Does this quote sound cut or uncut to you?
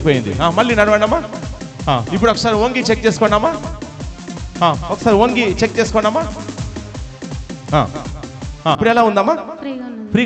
cut